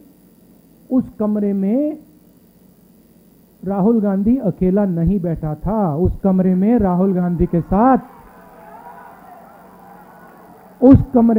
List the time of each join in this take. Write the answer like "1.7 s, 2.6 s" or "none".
none